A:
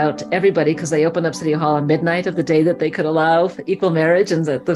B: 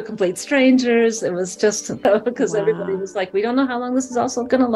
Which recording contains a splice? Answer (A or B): B